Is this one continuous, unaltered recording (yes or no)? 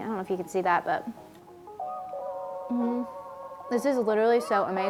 yes